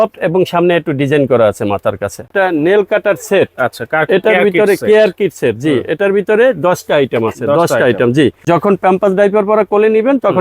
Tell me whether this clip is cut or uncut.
cut